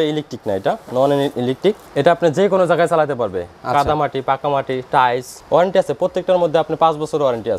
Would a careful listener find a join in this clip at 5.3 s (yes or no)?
yes